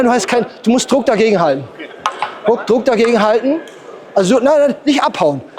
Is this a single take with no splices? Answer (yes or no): yes